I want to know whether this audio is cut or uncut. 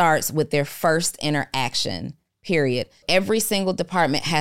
cut